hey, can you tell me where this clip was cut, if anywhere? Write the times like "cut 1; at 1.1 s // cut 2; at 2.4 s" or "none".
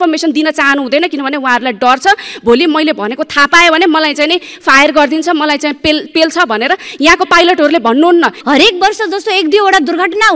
cut 1; at 8.4 s

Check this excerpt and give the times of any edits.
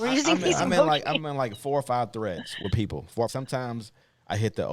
cut 1; at 3.3 s

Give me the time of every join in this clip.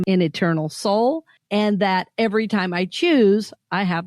cut 1; at 1.3 s

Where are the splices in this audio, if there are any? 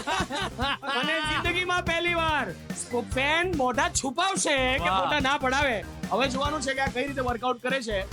none

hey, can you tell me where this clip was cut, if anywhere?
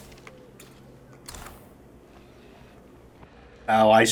none

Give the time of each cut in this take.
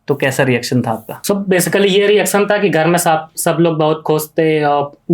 none

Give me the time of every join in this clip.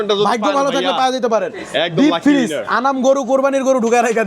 none

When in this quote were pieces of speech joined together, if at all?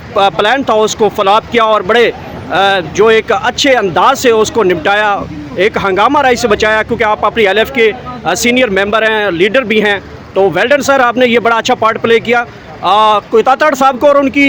none

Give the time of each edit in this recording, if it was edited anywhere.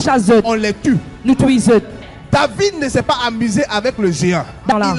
none

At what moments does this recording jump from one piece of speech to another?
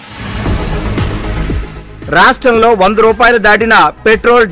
cut 1; at 1.6 s

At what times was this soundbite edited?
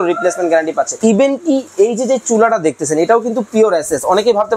cut 1; at 0.9 s

